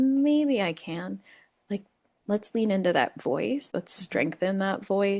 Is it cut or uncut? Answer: cut